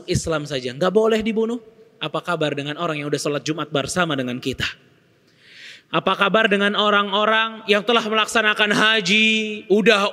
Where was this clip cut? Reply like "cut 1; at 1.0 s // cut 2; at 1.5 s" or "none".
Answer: none